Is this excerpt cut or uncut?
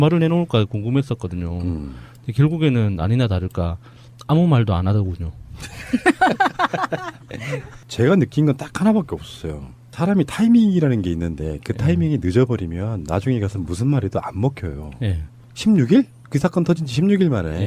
cut